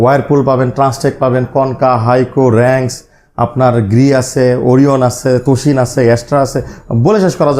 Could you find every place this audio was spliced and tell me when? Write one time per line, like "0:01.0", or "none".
none